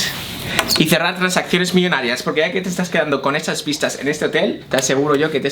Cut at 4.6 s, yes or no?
yes